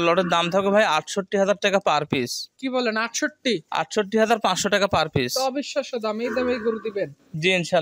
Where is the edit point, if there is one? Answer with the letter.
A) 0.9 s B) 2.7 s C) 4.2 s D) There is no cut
A